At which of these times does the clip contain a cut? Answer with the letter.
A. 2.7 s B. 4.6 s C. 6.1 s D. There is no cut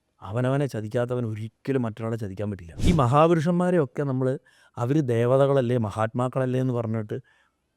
A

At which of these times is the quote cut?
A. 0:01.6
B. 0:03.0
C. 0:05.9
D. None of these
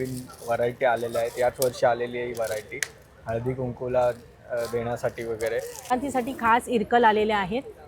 C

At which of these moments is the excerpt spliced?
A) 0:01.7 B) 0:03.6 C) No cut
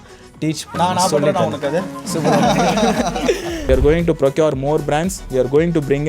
B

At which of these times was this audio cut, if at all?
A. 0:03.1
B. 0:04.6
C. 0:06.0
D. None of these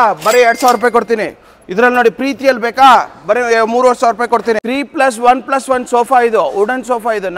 B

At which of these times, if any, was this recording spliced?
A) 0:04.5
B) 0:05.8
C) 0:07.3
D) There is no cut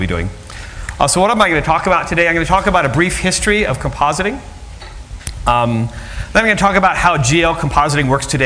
B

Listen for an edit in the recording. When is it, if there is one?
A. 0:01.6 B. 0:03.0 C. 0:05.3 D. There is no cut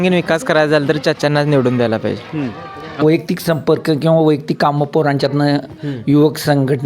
B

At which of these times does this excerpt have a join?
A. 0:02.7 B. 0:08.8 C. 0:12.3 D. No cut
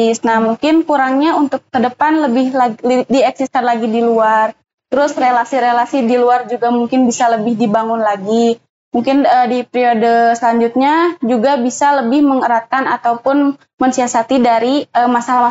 D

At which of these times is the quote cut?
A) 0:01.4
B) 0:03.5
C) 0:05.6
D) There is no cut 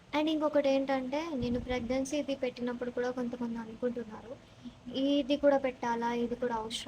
D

